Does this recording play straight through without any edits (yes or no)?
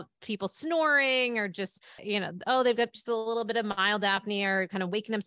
no